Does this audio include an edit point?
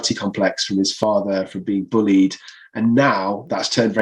no; 0 cuts

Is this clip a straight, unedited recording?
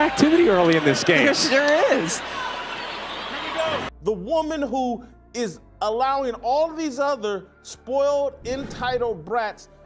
no; 1 cut; at 3.8 s

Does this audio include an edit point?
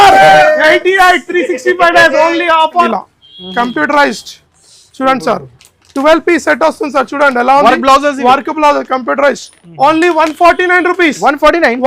yes; 1 cut; at 2.9 s

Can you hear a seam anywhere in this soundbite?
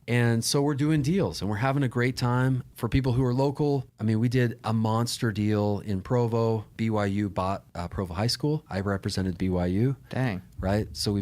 yes; 5 cuts; at 2.6 s, 3.9 s, 6.7 s, 7.8 s, 8.7 s

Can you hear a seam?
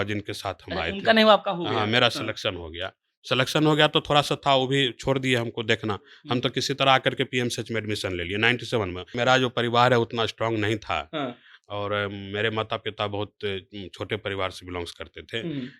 yes; 1 cut; at 9.1 s

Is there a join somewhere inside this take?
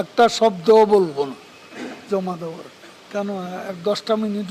yes; 1 cut; at 3.0 s

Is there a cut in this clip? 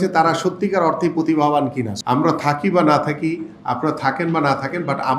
yes; 1 cut; at 1.9 s

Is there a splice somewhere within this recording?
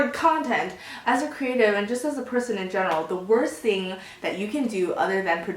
yes; 1 cut; at 1.0 s

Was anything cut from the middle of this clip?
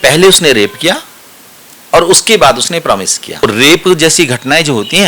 yes; 1 cut; at 3.4 s

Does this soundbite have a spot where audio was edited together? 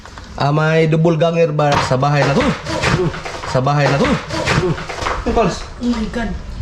yes; 3 cuts; at 1.9 s, 3.5 s, 5.0 s

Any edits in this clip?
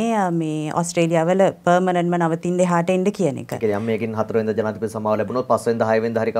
no; 0 cuts

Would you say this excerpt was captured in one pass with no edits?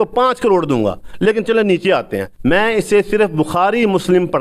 no; 1 cut; at 2.2 s

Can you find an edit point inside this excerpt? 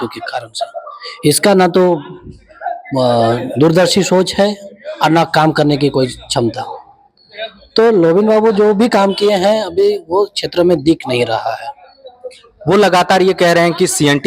no; 0 cuts

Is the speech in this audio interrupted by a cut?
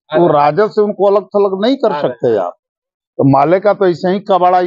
yes; 1 cut; at 3.0 s

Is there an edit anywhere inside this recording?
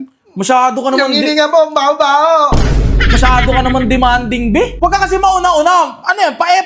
yes; 1 cut; at 4.7 s

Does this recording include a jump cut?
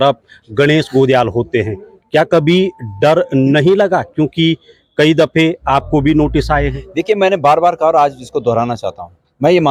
no; 0 cuts

